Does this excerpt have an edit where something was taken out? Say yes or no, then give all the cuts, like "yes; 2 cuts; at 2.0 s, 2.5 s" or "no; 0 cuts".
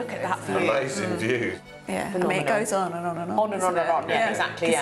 no; 0 cuts